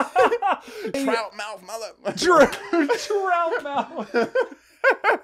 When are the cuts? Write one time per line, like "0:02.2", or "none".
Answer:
0:01.0